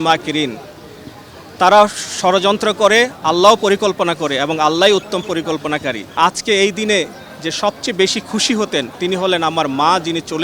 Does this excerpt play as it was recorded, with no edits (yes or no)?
no